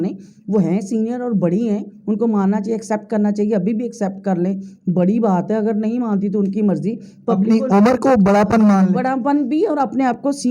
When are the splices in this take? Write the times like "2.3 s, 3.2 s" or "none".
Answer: none